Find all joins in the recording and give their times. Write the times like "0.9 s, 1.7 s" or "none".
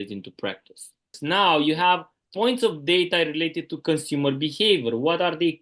1.2 s, 2.2 s